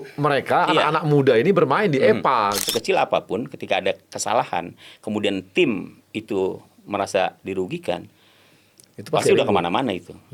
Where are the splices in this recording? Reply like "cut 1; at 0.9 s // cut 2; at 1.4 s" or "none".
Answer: cut 1; at 2.6 s